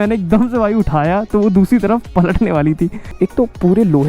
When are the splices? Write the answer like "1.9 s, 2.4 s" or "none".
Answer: 3.0 s